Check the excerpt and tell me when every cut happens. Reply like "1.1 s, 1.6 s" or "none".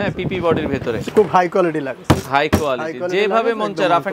1.0 s